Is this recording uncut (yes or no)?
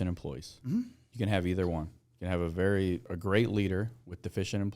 no